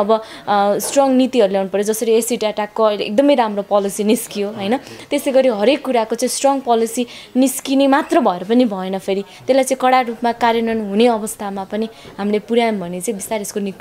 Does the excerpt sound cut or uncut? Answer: uncut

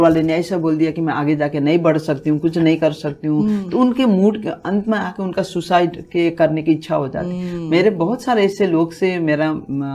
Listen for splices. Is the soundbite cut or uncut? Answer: uncut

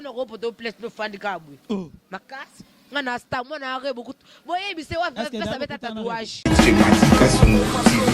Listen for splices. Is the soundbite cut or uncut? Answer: cut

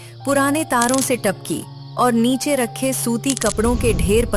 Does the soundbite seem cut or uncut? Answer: uncut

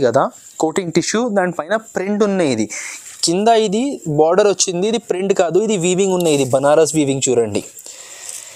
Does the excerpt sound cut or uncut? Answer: uncut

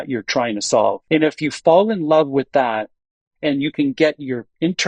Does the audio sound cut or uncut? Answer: cut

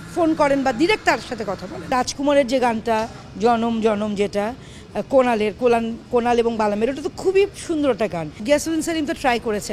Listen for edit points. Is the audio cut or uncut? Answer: cut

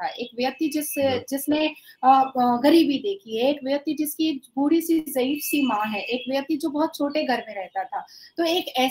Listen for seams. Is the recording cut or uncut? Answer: uncut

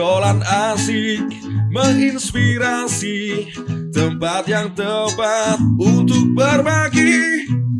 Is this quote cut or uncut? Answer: uncut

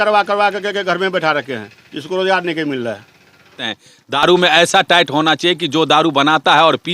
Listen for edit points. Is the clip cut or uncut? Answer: cut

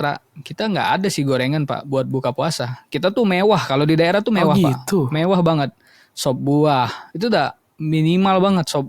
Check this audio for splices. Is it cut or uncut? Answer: uncut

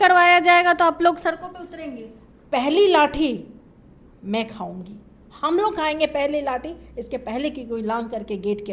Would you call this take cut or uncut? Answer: uncut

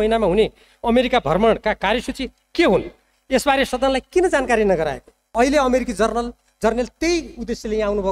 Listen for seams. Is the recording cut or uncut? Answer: cut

